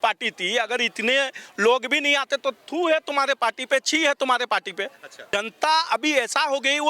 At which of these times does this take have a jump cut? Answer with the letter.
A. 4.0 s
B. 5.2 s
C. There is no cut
B